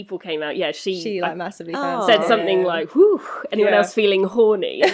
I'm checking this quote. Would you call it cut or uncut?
uncut